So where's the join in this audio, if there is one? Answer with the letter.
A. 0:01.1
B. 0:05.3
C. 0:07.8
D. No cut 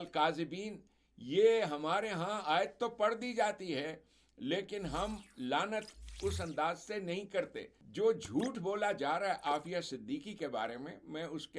C